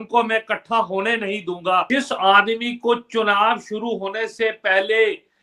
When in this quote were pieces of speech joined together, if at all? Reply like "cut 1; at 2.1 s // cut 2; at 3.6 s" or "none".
cut 1; at 1.9 s